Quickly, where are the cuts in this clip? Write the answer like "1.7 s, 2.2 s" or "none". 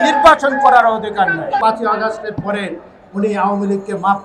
1.6 s